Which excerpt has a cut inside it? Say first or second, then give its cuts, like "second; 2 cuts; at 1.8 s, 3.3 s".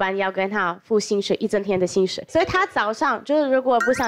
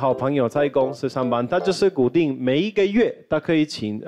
first; 1 cut; at 2.2 s